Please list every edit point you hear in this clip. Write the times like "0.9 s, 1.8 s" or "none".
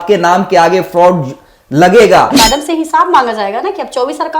2.3 s